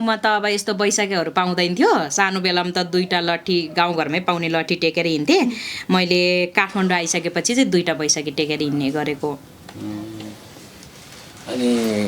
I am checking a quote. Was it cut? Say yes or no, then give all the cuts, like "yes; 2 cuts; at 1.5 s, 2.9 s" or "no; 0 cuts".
no; 0 cuts